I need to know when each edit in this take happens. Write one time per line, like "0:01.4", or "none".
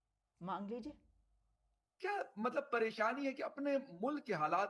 0:01.4